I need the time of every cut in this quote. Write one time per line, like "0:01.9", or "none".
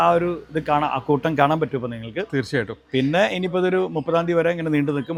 none

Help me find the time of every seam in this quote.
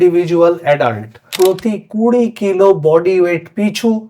0:01.3

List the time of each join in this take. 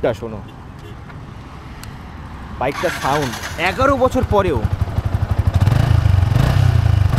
none

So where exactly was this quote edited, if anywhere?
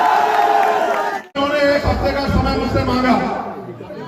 0:01.3

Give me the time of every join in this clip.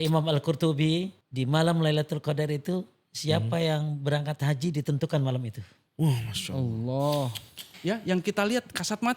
0:01.2
0:07.7

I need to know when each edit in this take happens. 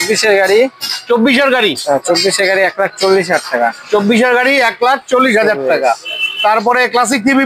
none

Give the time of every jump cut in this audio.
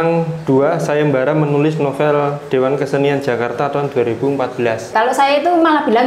0:04.9

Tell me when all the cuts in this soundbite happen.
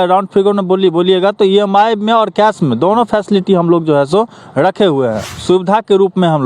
0:05.4

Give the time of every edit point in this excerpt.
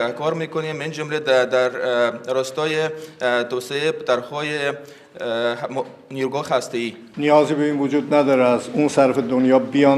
0:07.0

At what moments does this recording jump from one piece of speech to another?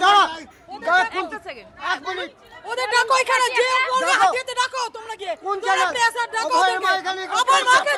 none

